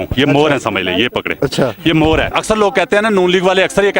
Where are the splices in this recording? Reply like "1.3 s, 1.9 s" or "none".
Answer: 2.3 s